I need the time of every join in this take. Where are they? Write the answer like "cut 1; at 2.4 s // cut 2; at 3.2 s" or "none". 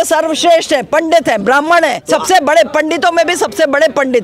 cut 1; at 2.0 s